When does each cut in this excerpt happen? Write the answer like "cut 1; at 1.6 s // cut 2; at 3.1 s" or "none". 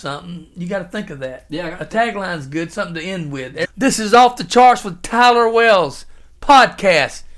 cut 1; at 3.7 s

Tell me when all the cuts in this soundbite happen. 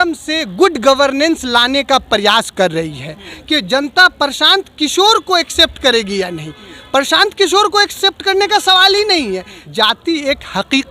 cut 1; at 3.3 s // cut 2; at 9.6 s

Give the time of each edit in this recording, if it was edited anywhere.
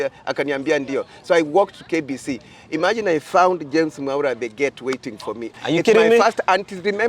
cut 1; at 5.5 s

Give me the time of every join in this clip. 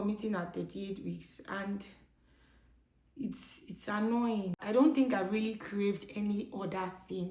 cut 1; at 4.6 s

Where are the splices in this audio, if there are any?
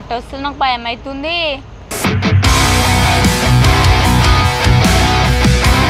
none

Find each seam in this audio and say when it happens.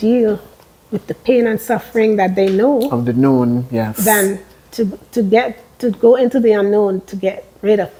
none

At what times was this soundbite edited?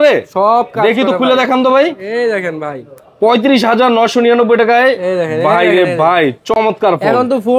none

